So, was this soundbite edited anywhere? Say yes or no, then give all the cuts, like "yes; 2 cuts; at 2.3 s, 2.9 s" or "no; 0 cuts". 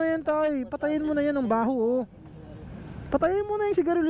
no; 0 cuts